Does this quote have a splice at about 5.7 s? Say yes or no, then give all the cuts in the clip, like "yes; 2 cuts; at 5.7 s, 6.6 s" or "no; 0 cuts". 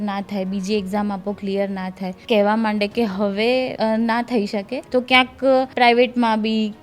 yes; 4 cuts; at 2.1 s, 3.7 s, 4.8 s, 5.7 s